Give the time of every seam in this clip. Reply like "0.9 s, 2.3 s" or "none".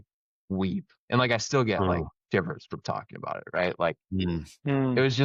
none